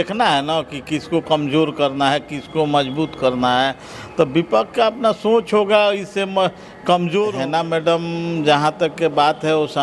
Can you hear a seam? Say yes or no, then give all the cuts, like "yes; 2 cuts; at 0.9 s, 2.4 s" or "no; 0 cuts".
yes; 1 cut; at 7.4 s